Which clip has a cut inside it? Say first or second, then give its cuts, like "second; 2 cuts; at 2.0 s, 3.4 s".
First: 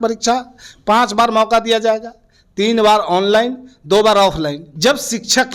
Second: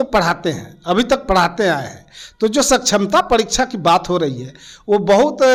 first; 1 cut; at 4.6 s